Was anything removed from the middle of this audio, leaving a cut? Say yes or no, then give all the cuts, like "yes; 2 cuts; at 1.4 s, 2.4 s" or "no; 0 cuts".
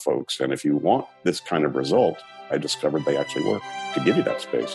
yes; 3 cuts; at 1.1 s, 2.3 s, 3.9 s